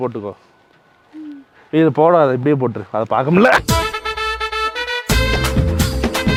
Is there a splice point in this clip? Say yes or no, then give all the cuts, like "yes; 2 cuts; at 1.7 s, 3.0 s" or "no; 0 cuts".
no; 0 cuts